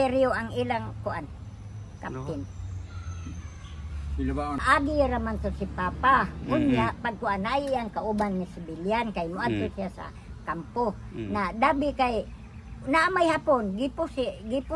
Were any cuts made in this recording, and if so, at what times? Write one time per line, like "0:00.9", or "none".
0:04.6